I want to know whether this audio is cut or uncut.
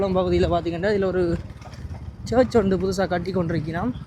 uncut